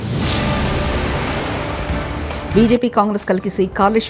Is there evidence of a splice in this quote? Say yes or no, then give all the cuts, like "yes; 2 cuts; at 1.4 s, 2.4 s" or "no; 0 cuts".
no; 0 cuts